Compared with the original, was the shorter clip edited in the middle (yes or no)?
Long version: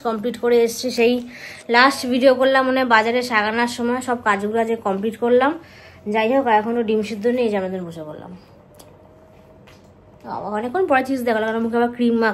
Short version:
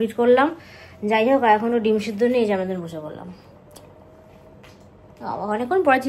no